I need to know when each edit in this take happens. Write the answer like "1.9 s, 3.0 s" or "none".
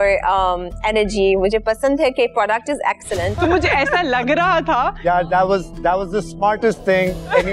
3.3 s